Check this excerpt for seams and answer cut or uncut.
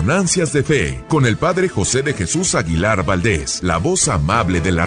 cut